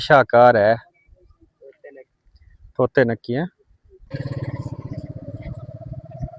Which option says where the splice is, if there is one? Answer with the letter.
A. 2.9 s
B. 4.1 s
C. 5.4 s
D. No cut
B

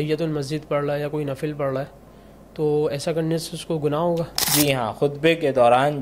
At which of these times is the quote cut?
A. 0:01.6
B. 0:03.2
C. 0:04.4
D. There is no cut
C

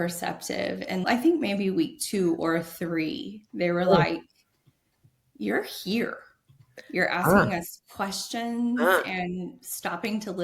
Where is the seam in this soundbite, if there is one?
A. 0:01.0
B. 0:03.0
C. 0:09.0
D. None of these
A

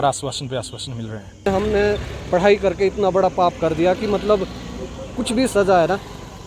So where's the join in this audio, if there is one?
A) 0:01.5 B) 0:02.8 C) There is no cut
A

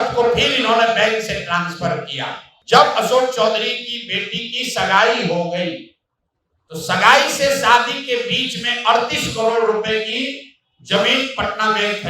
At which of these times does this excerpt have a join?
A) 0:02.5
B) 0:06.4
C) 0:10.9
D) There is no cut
A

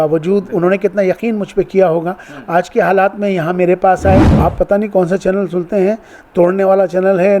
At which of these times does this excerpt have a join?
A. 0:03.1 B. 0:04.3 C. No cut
B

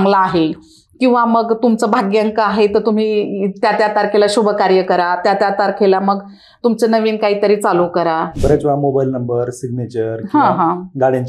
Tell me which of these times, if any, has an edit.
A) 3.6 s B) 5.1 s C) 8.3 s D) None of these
C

